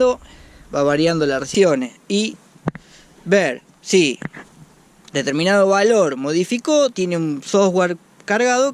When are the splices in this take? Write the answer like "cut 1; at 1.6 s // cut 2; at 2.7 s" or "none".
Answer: cut 1; at 1.5 s